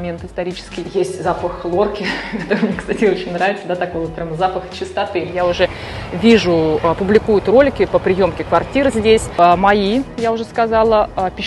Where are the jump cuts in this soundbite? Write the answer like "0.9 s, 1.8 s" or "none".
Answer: 0.9 s, 5.3 s, 9.3 s